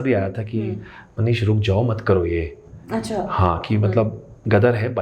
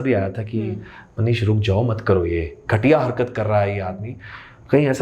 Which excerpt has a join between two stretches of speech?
second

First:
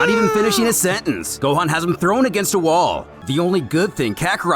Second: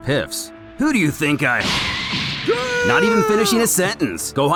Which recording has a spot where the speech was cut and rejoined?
first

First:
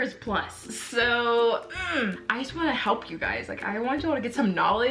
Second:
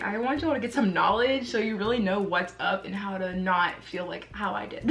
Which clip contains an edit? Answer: first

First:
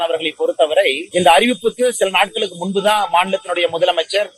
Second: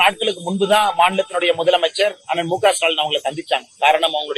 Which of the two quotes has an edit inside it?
first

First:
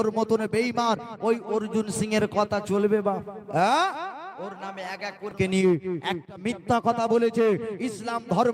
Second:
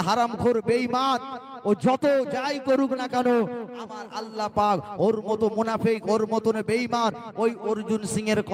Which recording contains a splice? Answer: first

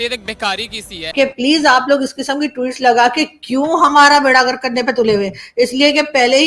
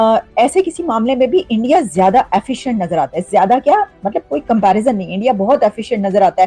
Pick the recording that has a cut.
first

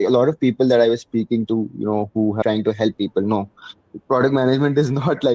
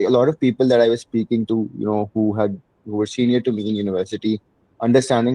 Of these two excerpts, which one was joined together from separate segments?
first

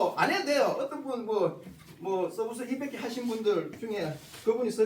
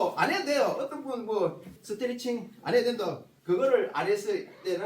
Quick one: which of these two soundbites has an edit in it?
second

